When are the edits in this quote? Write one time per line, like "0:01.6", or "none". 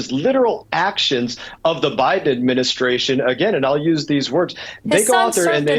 none